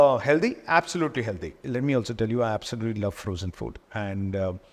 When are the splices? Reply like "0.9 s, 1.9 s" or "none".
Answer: 1.6 s